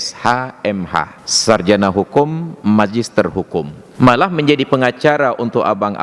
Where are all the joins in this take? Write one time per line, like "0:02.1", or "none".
0:01.2
0:03.8